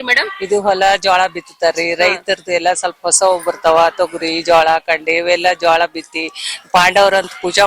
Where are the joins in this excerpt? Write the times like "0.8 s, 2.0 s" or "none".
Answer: none